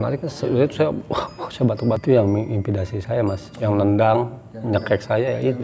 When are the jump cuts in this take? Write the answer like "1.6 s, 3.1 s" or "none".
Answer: 2.0 s